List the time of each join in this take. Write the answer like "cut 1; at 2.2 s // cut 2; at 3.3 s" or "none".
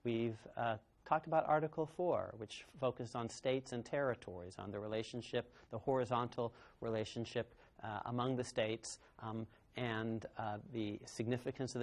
cut 1; at 8.0 s

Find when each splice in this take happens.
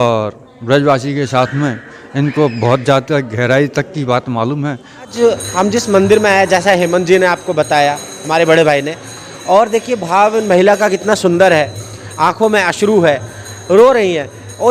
cut 1; at 5.1 s

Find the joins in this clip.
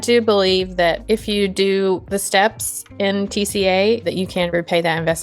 cut 1; at 1.0 s // cut 2; at 2.0 s // cut 3; at 4.3 s

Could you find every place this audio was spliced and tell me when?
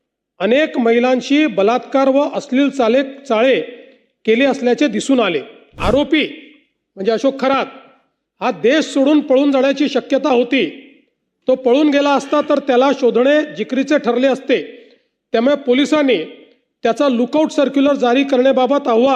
cut 1; at 5.8 s

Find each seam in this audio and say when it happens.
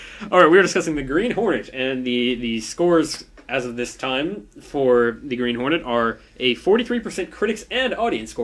cut 1; at 1.9 s

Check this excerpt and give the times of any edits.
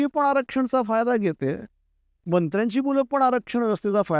none

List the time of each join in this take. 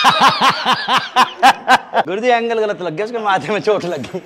cut 1; at 2.1 s

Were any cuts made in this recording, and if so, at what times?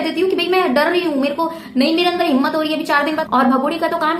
cut 1; at 3.2 s

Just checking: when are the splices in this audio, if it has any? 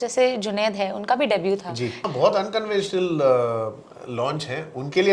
cut 1; at 2.1 s

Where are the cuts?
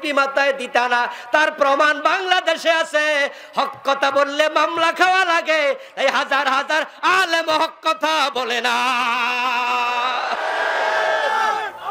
none

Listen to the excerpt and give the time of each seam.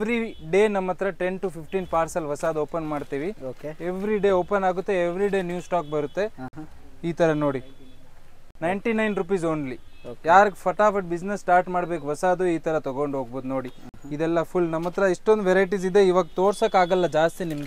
none

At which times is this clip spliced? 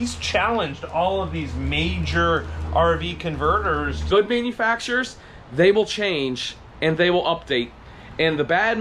cut 1; at 4.0 s

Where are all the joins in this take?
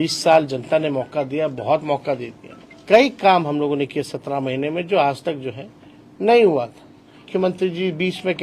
cut 1; at 2.7 s // cut 2; at 7.3 s

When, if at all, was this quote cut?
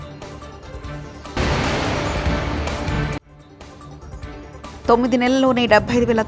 cut 1; at 1.3 s // cut 2; at 4.7 s

